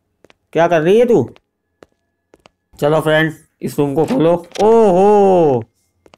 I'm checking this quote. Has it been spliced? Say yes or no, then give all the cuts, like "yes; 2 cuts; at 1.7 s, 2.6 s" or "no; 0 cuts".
no; 0 cuts